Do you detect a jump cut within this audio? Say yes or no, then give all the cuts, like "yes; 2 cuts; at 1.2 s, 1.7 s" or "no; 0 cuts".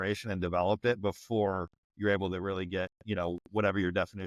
no; 0 cuts